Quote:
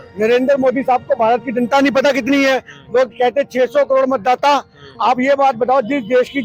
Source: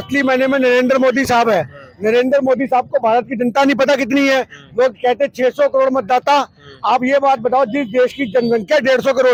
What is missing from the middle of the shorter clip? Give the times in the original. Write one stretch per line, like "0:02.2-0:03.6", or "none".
none